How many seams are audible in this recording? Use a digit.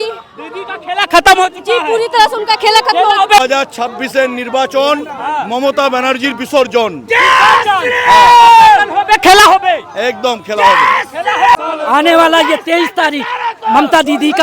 2